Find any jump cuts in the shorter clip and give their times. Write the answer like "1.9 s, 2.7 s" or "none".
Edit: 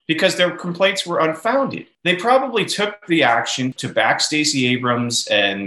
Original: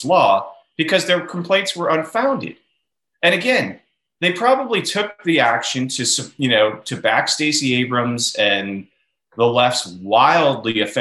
1.9 s, 3.8 s